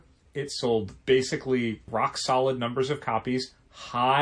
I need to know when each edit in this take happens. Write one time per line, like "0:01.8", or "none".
0:00.9
0:01.8

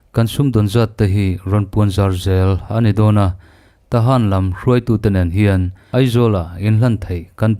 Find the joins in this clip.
0:05.8

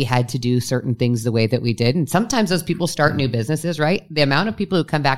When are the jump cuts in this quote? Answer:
none

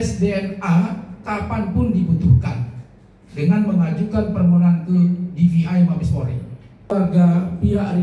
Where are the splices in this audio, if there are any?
0:06.9

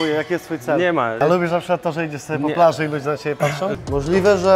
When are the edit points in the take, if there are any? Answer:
0:01.2
0:03.7

